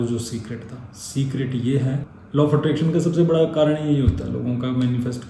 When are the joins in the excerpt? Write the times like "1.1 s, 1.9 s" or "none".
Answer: 2.1 s